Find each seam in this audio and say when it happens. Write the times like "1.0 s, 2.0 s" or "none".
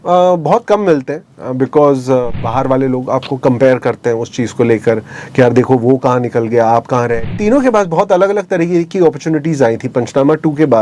2.5 s, 7.2 s